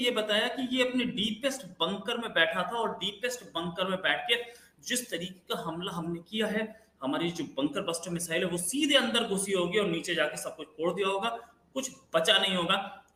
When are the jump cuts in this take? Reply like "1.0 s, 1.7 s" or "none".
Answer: none